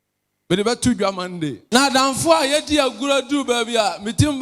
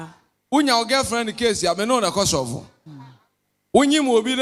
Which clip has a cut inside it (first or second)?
first